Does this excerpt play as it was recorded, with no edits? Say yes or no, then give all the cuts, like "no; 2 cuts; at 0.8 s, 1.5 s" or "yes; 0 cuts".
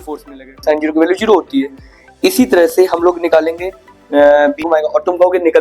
no; 1 cut; at 4.6 s